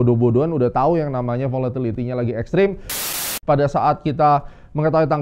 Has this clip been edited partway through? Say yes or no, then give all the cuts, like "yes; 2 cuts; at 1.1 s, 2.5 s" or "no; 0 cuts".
yes; 1 cut; at 3.0 s